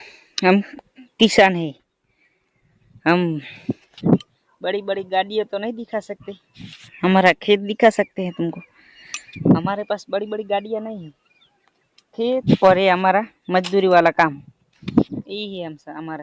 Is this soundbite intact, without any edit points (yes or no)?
yes